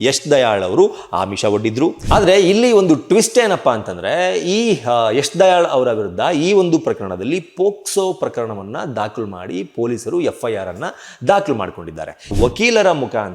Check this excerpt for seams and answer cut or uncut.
cut